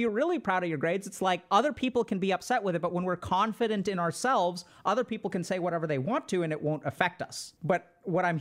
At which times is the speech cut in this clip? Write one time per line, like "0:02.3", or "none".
0:01.4
0:07.5